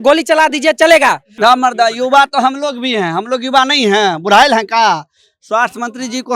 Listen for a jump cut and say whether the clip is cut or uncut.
cut